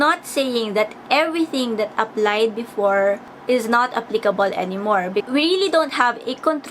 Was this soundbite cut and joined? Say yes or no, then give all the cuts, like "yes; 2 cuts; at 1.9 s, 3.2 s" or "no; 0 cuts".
yes; 2 cuts; at 3.3 s, 5.2 s